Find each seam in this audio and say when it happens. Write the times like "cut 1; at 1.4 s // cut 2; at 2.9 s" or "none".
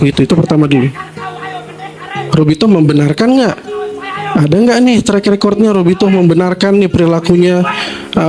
none

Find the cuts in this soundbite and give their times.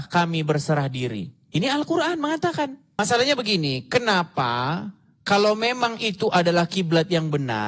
cut 1; at 3.0 s

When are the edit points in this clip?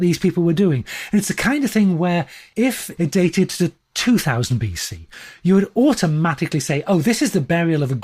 cut 1; at 2.5 s

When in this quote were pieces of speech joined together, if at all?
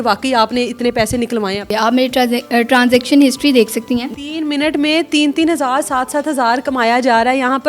cut 1; at 1.7 s // cut 2; at 4.1 s

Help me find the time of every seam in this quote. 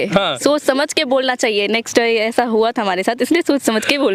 none

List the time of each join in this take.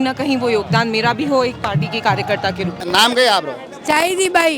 none

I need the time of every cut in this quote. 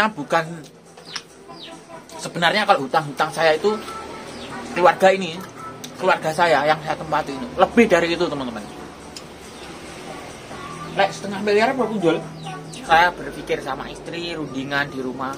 cut 1; at 12.8 s

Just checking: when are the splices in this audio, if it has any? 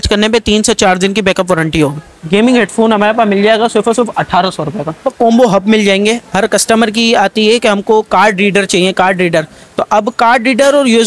cut 1; at 2.1 s // cut 2; at 5.1 s

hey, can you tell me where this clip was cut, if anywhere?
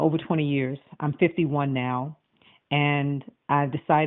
cut 1; at 1.1 s

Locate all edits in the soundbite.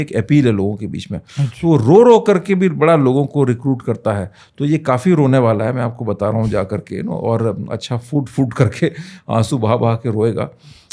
none

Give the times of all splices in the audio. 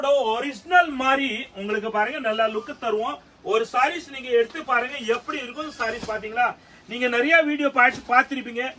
none

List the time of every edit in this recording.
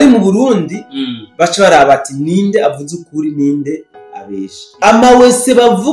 cut 1; at 4.6 s

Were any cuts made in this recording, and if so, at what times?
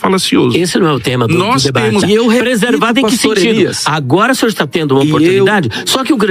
cut 1; at 2.0 s

